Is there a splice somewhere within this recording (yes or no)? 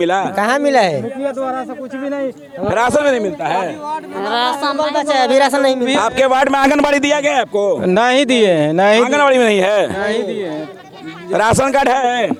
no